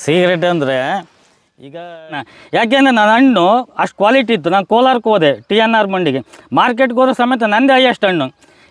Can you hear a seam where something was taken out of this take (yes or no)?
yes